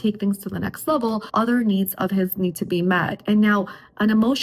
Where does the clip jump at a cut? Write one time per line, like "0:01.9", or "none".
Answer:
0:01.3